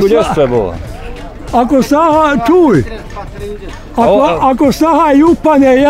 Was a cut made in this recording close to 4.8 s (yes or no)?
no